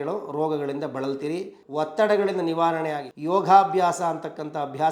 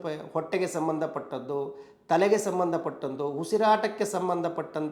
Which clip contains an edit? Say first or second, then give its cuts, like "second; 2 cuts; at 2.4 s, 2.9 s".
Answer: first; 2 cuts; at 1.6 s, 3.1 s